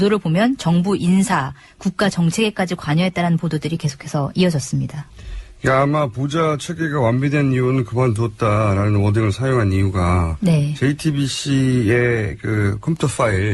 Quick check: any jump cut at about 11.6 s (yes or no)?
no